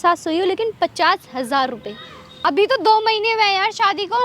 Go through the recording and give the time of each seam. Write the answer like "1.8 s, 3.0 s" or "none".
2.4 s